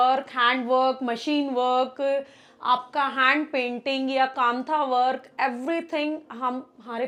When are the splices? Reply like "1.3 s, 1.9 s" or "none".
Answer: none